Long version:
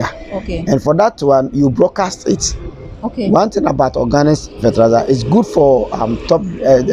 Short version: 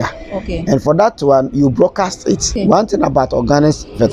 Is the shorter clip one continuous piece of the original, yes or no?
no